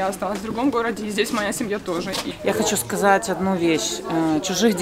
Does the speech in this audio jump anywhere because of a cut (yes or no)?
yes